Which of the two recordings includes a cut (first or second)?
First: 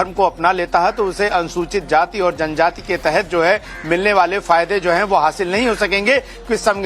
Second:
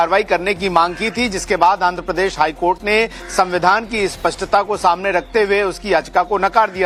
first